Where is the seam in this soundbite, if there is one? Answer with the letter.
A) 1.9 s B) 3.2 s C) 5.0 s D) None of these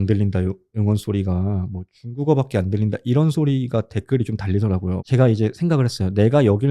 C